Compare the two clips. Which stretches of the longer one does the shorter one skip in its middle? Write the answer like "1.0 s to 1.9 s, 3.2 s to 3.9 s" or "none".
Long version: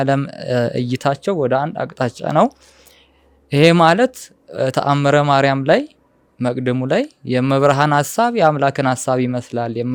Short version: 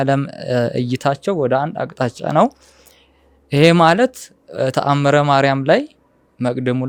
none